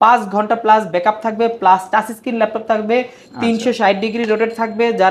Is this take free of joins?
yes; 0 cuts

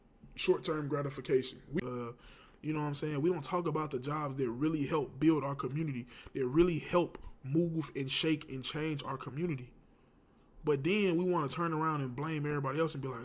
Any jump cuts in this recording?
yes; 1 cut; at 1.8 s

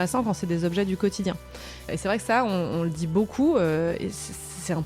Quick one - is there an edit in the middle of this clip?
yes; 1 cut; at 1.9 s

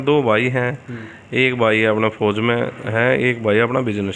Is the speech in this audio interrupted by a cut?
no; 0 cuts

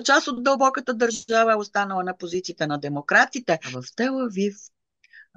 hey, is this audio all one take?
no; 1 cut; at 3.8 s

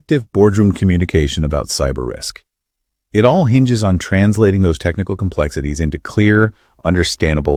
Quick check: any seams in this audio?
no; 0 cuts

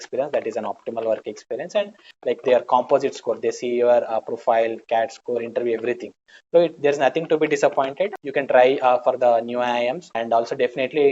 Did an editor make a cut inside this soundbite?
yes; 3 cuts; at 2.1 s, 8.1 s, 10.2 s

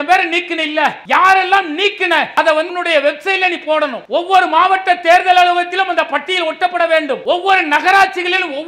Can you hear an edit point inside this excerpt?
yes; 4 cuts; at 1.0 s, 2.5 s, 4.0 s, 7.2 s

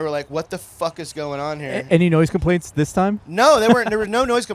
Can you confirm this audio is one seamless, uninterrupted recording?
yes; 0 cuts

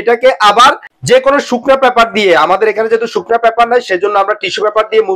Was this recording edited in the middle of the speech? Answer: yes; 1 cut; at 0.9 s

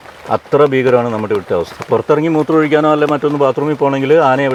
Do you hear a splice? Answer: no; 0 cuts

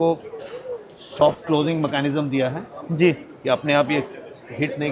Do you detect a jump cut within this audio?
no; 0 cuts

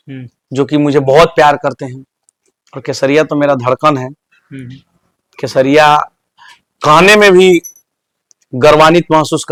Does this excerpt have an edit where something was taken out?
no; 0 cuts

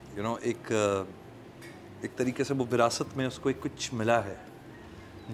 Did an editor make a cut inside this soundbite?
no; 0 cuts

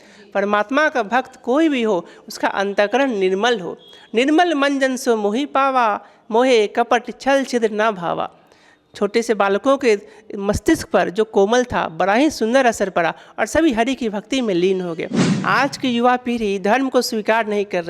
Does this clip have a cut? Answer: yes; 1 cut; at 15.3 s

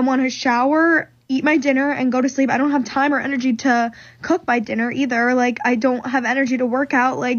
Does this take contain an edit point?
no; 0 cuts

